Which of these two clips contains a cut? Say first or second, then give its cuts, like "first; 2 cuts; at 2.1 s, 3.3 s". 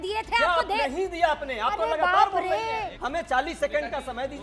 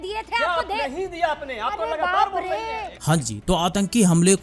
first; 1 cut; at 2.9 s